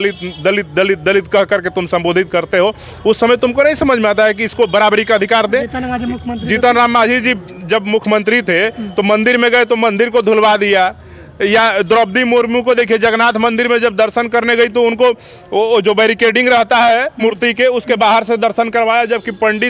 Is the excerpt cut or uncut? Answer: uncut